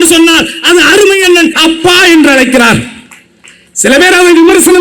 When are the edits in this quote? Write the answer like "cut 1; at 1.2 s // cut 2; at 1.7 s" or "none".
cut 1; at 1.5 s